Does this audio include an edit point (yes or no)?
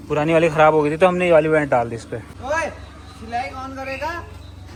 no